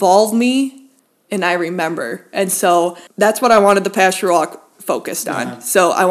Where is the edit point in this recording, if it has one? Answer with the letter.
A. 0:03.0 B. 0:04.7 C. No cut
A